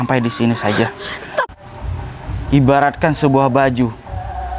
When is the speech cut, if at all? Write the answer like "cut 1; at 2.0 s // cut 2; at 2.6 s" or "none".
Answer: cut 1; at 1.6 s